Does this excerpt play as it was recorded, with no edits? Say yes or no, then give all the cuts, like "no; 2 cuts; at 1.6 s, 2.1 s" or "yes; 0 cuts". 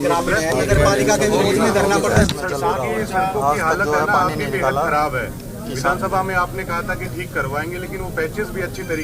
no; 1 cut; at 2.3 s